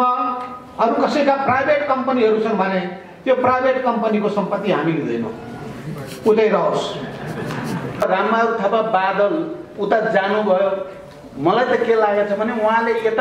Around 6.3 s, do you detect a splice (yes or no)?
no